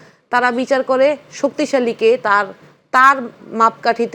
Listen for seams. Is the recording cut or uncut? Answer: uncut